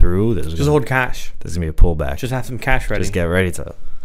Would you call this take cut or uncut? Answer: uncut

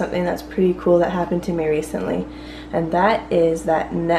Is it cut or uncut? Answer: uncut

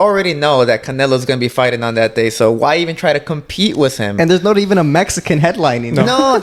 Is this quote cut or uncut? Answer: uncut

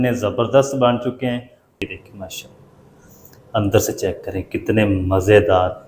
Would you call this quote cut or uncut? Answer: cut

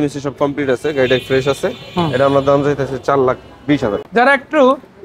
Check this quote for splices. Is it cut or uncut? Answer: cut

